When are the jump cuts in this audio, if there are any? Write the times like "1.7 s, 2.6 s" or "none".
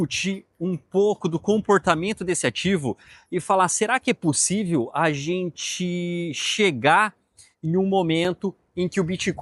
none